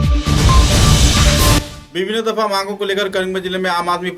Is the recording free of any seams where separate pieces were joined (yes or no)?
yes